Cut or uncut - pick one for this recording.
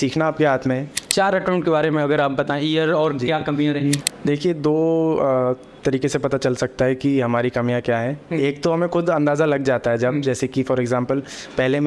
cut